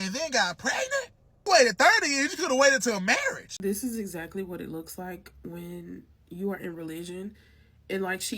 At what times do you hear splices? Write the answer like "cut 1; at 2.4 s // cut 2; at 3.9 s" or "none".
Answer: cut 1; at 1.4 s // cut 2; at 3.5 s